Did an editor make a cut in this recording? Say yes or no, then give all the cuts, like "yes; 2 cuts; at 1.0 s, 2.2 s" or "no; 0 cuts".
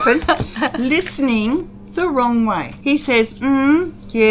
yes; 1 cut; at 2.7 s